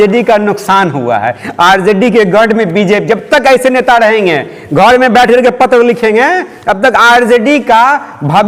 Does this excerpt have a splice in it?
no; 0 cuts

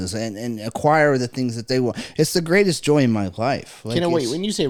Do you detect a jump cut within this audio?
no; 0 cuts

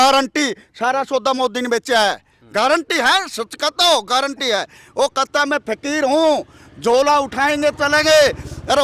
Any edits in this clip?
no; 0 cuts

